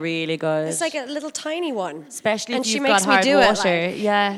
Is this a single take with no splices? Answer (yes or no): yes